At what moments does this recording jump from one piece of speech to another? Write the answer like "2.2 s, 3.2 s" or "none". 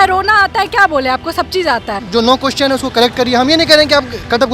2.0 s